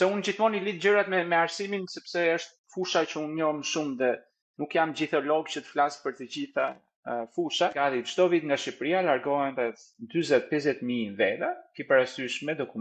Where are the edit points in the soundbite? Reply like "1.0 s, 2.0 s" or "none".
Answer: 7.7 s